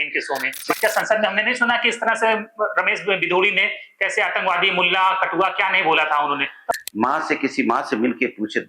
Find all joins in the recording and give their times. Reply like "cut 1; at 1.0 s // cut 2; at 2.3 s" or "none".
cut 1; at 0.8 s // cut 2; at 6.7 s